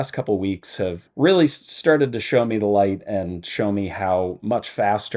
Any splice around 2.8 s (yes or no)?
no